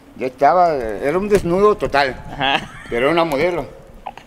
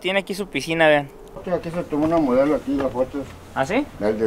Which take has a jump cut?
second; 1 cut; at 1.4 s

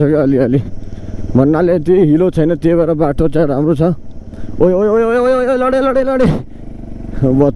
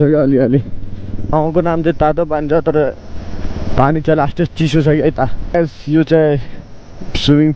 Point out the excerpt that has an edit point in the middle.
second; 2 cuts; at 1.1 s, 5.4 s

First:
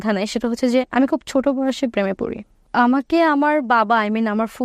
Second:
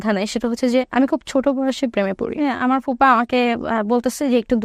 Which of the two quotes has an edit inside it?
second; 1 cut; at 2.4 s

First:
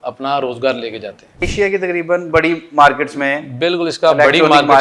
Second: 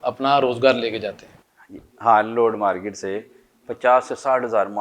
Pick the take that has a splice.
first; 1 cut; at 1.3 s

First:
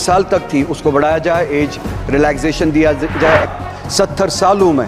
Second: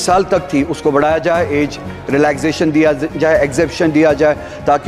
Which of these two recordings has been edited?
first; 1 cut; at 3.5 s

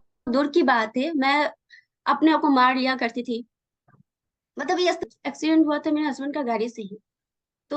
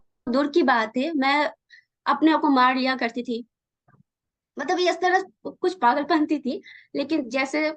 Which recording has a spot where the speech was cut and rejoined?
first; 1 cut; at 5.0 s

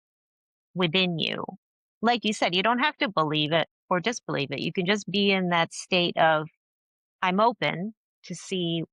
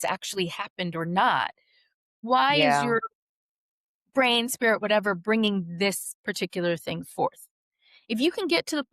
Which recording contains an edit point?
second; 1 cut; at 2.2 s

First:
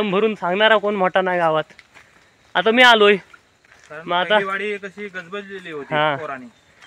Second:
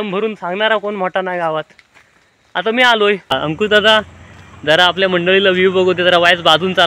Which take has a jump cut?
second; 1 cut; at 3.6 s

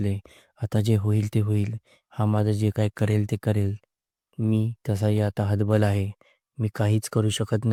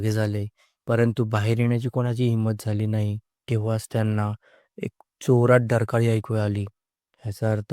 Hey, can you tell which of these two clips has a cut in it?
second; 1 cut; at 3.3 s

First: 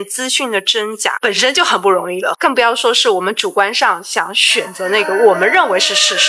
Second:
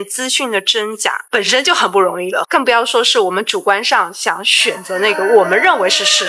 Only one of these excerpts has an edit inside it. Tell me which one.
first; 1 cut; at 1.2 s

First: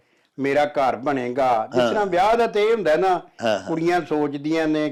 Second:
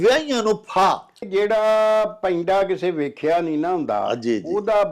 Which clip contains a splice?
second; 1 cut; at 1.2 s

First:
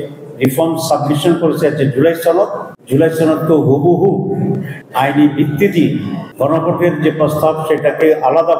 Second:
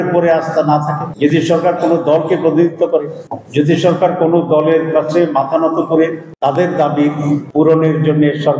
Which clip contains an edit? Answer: second; 1 cut; at 7.5 s

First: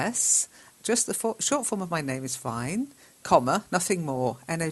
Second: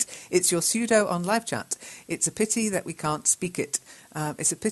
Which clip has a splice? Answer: first; 1 cut; at 1.4 s

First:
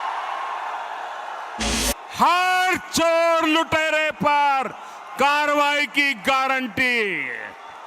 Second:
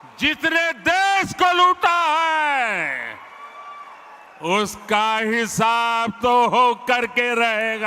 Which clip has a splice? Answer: first; 1 cut; at 1.7 s

